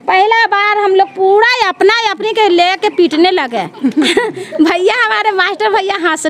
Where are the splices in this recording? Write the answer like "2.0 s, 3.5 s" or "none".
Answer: none